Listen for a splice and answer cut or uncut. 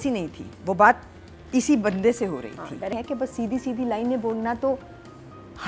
cut